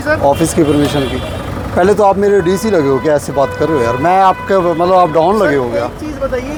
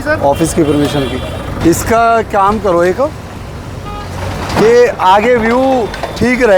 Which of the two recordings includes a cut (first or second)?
second